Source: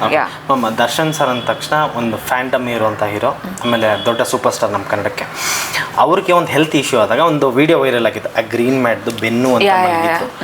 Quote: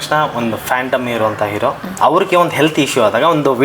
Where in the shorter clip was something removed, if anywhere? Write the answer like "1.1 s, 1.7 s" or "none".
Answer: 1.9 s